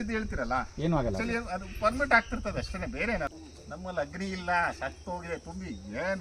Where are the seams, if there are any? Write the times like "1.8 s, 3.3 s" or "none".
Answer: 3.3 s